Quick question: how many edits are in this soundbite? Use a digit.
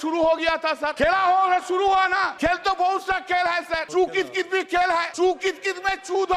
4